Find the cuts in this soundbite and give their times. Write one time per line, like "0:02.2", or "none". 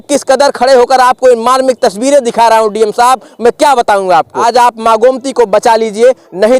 0:04.3